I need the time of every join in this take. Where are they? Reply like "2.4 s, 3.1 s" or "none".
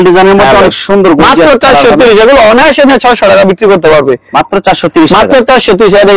none